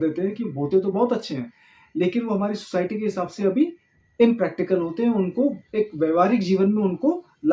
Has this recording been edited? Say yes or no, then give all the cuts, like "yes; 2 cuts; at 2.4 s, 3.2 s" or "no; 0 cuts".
no; 0 cuts